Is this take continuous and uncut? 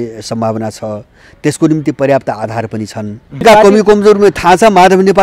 no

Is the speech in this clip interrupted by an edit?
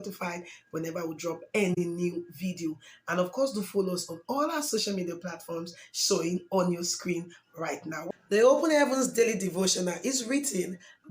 yes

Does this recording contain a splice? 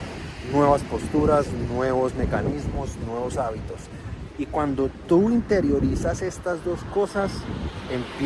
no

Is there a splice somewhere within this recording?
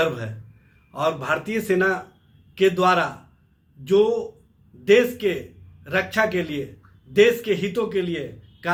no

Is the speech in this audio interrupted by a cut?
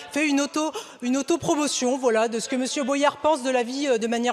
no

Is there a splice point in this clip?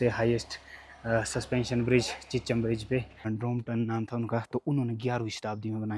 yes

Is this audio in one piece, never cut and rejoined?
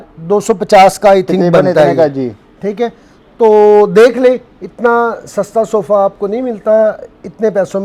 yes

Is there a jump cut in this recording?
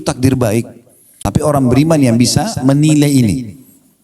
yes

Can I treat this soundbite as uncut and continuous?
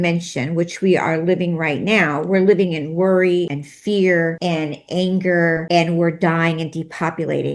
no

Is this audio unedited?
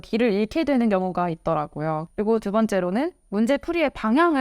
no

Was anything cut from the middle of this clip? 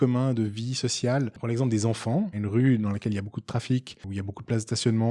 yes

